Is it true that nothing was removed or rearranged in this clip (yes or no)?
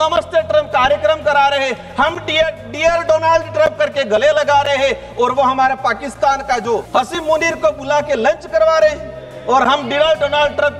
no